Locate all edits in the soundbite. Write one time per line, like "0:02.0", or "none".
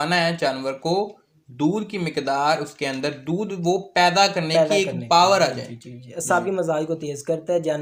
none